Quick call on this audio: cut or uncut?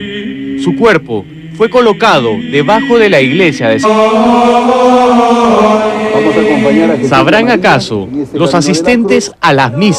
uncut